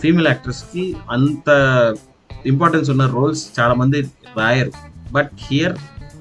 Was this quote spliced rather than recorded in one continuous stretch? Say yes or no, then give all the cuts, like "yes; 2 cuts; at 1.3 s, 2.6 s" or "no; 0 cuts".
no; 0 cuts